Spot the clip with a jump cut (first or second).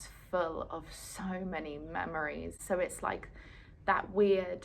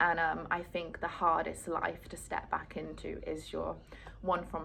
first